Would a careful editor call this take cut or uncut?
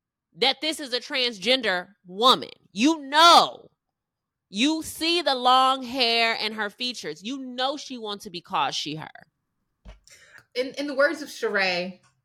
cut